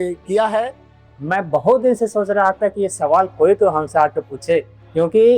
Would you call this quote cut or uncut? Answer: uncut